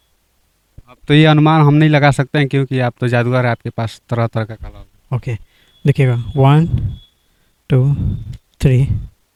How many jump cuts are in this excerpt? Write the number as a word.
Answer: zero